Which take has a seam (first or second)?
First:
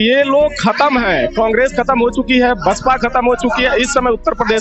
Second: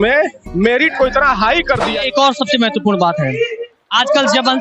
second